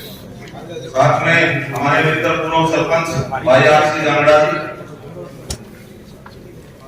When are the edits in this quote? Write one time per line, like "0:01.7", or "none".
0:05.6